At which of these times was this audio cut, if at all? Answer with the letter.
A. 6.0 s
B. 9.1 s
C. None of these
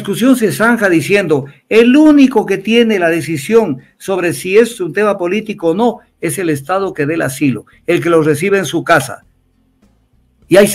C